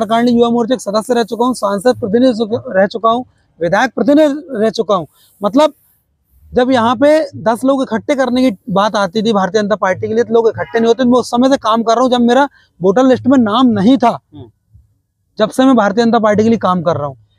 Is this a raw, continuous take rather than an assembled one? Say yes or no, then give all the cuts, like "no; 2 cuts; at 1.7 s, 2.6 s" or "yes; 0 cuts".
yes; 0 cuts